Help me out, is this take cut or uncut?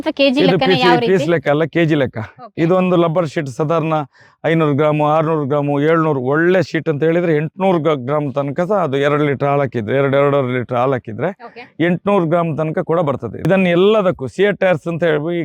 cut